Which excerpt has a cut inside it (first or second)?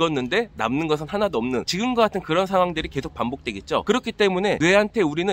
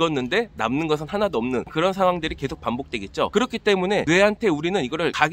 second